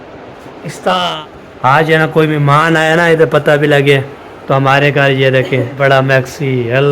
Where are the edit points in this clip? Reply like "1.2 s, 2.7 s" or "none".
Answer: 1.2 s, 5.8 s